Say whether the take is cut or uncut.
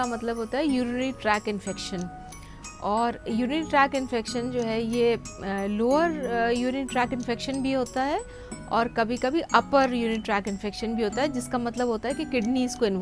uncut